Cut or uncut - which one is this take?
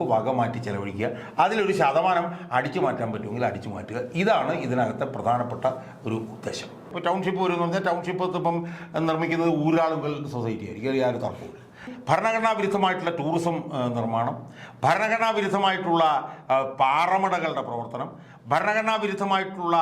cut